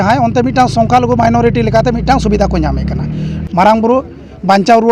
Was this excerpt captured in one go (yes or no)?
no